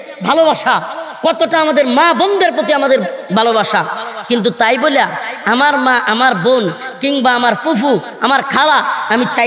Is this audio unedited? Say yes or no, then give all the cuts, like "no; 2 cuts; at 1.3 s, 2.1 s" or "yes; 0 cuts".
yes; 0 cuts